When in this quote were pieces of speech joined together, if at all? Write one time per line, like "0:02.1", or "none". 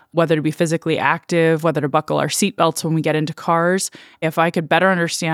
0:04.2